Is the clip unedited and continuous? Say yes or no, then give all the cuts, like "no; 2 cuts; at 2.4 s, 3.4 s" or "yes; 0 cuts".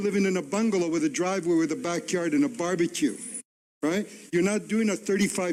yes; 0 cuts